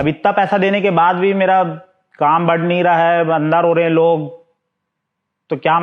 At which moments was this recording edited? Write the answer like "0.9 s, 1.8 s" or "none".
none